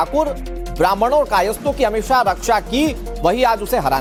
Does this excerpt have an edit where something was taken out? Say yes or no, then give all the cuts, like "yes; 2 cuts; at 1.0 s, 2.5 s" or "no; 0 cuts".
no; 0 cuts